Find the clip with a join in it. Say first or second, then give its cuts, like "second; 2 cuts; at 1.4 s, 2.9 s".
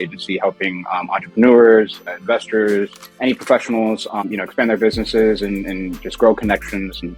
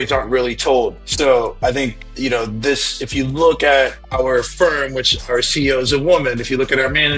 second; 3 cuts; at 1.0 s, 2.0 s, 4.0 s